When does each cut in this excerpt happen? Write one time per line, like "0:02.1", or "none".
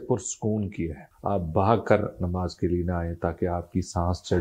0:01.1